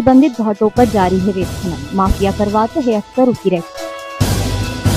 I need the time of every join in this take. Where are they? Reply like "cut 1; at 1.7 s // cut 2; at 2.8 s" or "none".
none